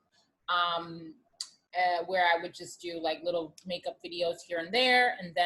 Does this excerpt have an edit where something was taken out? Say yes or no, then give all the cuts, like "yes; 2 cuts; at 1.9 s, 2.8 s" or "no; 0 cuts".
no; 0 cuts